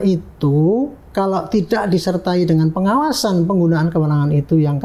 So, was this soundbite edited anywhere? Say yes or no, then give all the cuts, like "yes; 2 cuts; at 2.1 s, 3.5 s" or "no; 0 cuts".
no; 0 cuts